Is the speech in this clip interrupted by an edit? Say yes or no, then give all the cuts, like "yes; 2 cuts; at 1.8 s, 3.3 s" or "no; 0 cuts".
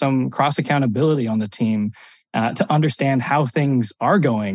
no; 0 cuts